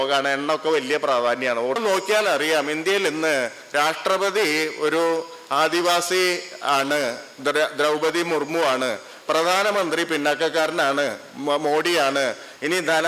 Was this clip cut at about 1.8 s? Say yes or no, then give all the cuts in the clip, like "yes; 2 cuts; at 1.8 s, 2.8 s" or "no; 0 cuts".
yes; 1 cut; at 1.8 s